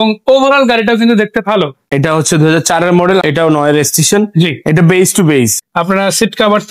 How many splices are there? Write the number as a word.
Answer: three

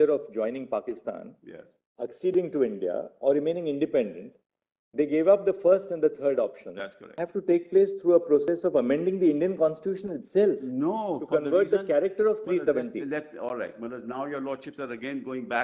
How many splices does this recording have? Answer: one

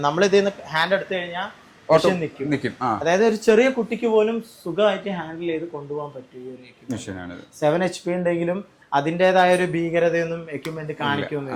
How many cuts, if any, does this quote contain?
zero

